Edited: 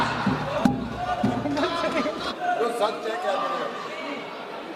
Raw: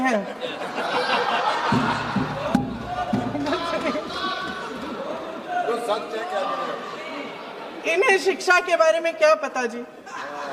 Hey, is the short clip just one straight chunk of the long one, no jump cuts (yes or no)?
no